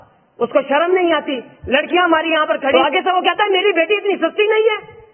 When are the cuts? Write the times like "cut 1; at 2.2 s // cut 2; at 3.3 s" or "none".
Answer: cut 1; at 2.7 s